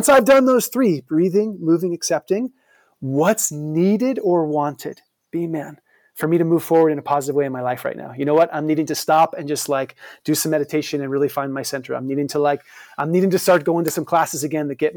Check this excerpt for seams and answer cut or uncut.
uncut